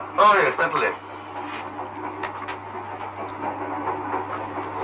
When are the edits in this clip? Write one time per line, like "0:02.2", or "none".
none